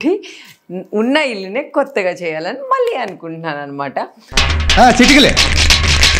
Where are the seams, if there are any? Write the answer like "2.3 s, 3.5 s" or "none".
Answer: none